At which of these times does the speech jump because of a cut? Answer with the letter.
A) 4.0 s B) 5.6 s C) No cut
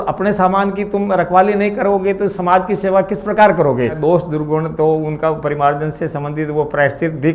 A